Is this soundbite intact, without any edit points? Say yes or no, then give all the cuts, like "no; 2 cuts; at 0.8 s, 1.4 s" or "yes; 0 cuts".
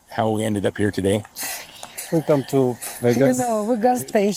yes; 0 cuts